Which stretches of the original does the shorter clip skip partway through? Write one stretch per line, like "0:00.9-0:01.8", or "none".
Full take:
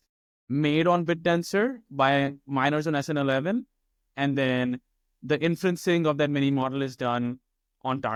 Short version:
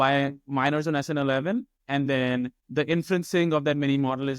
0:03.8-0:04.0
0:04.9-0:05.1